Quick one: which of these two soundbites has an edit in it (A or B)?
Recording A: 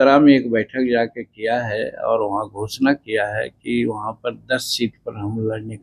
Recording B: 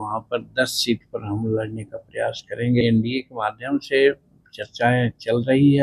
B